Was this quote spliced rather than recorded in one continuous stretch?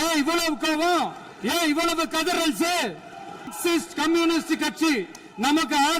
yes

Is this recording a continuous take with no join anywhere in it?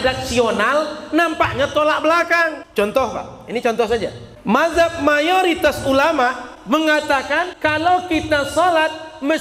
no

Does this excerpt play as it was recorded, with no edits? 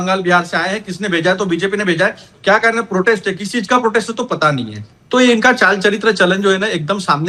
yes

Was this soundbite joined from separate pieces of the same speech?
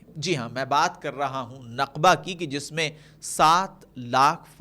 no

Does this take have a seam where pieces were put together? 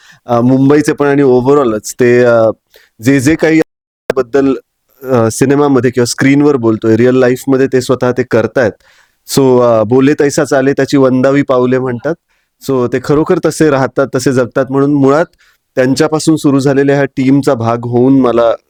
no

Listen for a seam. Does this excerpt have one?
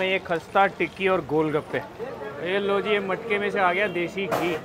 yes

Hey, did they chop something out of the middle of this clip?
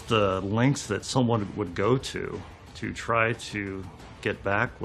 no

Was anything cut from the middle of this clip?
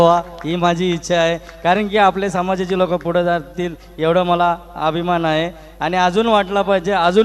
no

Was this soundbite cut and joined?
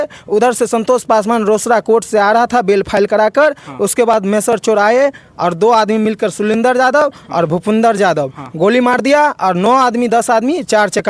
no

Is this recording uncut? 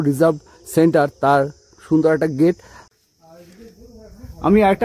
no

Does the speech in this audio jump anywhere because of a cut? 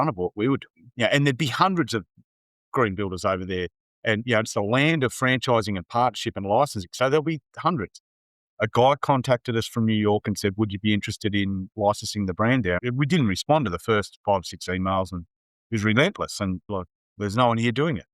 yes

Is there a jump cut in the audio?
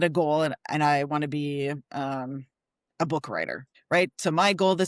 no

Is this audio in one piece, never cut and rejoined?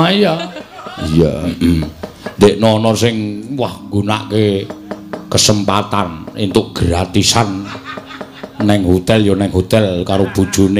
no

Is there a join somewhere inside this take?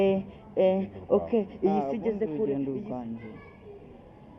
yes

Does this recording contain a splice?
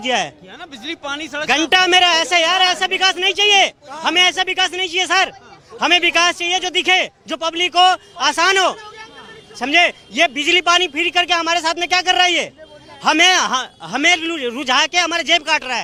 no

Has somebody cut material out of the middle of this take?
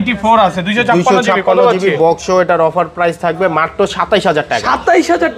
no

